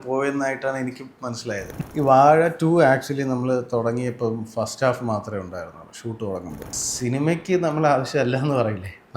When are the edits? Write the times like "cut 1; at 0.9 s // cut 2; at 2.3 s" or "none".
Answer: cut 1; at 1.8 s // cut 2; at 6.8 s